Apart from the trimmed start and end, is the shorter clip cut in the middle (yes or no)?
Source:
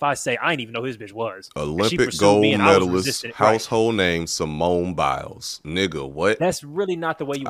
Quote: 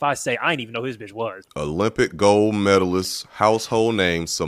no